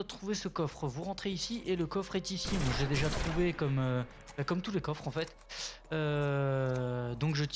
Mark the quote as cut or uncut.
cut